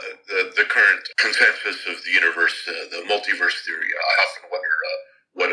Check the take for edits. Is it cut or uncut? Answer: cut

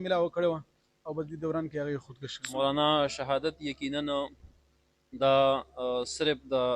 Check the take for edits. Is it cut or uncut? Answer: cut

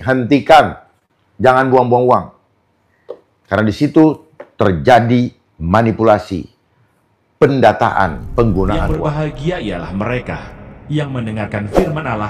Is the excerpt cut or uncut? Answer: cut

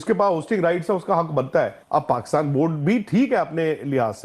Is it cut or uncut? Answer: cut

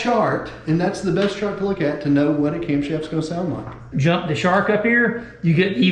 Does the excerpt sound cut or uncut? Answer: cut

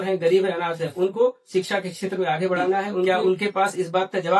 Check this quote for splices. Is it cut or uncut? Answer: cut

